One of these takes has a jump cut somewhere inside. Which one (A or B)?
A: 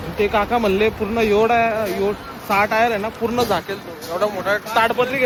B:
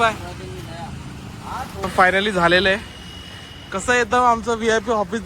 B